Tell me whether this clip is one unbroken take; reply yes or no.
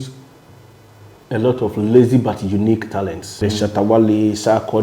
no